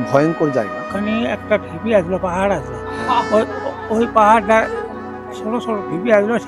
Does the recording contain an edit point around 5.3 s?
no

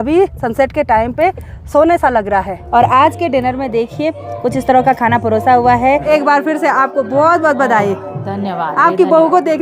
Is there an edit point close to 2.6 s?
yes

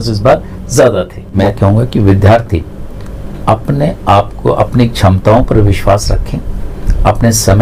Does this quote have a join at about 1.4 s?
yes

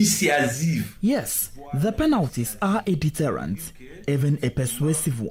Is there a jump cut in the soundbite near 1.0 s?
no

